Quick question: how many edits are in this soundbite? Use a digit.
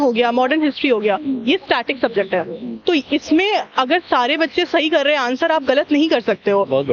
0